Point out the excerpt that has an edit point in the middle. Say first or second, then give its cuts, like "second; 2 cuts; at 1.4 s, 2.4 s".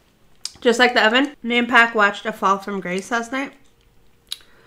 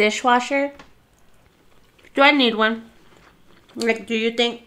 first; 1 cut; at 1.4 s